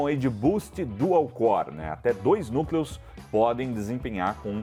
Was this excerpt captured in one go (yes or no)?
yes